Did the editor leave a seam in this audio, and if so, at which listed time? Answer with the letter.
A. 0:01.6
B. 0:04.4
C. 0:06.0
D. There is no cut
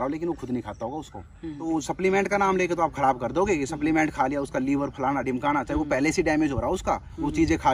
A